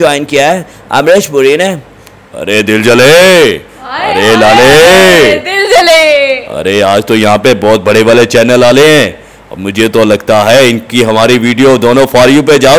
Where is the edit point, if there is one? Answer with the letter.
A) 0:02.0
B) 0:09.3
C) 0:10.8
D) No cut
D